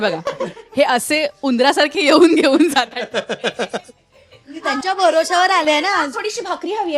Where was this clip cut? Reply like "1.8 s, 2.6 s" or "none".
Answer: none